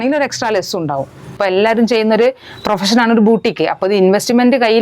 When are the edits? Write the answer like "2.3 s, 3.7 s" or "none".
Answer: 1.4 s